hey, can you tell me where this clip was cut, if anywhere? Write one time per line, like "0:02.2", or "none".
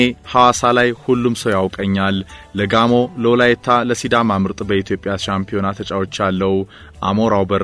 none